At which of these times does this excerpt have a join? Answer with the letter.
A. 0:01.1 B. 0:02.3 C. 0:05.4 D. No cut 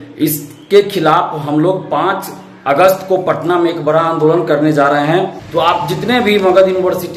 C